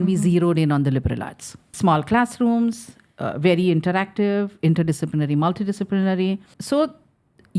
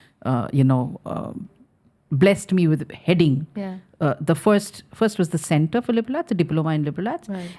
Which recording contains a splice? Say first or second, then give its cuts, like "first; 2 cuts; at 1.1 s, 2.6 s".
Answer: first; 2 cuts; at 1.7 s, 6.5 s